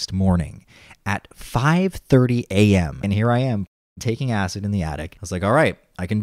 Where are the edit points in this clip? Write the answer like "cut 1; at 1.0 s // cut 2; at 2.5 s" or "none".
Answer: cut 1; at 2.9 s // cut 2; at 5.1 s